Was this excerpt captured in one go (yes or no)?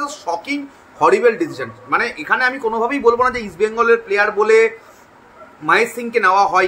yes